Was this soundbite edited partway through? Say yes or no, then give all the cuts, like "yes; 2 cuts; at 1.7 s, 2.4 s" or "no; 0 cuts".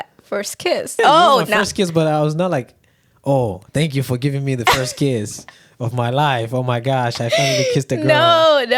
yes; 1 cut; at 0.9 s